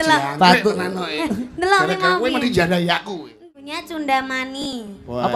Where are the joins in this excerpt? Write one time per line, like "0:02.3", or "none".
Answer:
0:03.5